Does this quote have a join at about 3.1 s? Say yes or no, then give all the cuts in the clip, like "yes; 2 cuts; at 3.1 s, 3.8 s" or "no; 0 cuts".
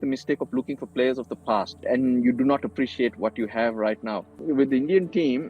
no; 2 cuts; at 1.8 s, 4.3 s